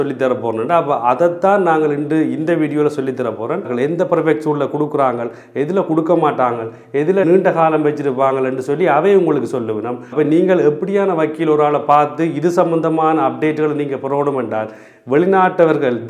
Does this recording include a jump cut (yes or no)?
yes